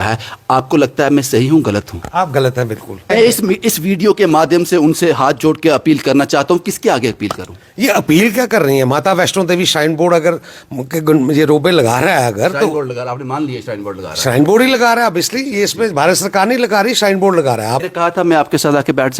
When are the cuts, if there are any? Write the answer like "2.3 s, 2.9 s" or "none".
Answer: 3.1 s, 17.8 s